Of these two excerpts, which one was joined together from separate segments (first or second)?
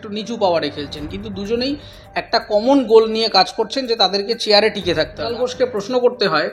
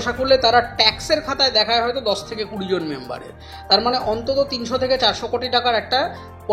first